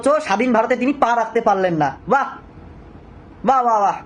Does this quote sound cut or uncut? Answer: uncut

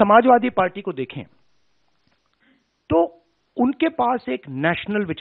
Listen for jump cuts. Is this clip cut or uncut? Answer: uncut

